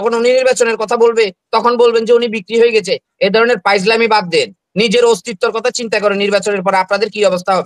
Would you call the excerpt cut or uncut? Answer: uncut